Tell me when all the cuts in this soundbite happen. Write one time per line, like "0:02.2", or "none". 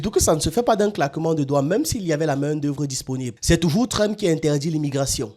0:03.3